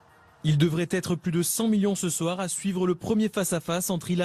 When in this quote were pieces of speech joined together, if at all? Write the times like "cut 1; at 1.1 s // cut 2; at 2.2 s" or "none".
none